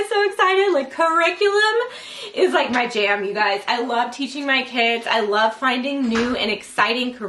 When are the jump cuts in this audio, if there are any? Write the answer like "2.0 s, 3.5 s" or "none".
none